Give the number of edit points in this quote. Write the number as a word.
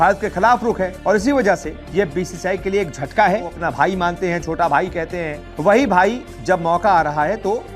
one